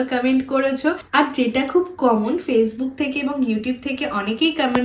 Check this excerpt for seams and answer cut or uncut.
cut